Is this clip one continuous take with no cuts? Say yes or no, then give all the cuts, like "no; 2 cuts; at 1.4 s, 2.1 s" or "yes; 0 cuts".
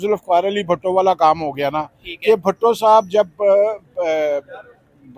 yes; 0 cuts